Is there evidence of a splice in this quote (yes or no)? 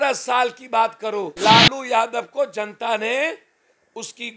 yes